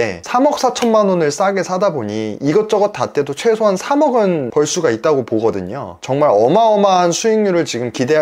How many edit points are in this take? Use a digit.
0